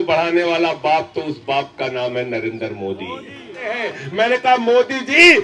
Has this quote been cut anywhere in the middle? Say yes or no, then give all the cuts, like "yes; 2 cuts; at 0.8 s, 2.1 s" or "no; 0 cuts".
yes; 1 cut; at 3.9 s